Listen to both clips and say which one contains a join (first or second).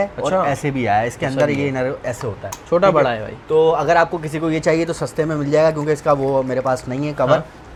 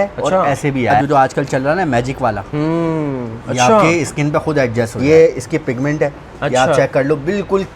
second